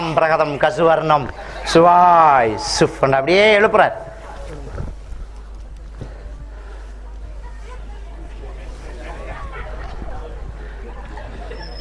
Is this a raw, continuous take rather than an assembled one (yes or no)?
yes